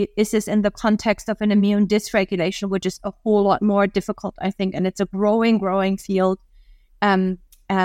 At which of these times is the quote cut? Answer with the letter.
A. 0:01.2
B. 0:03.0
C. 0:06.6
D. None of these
D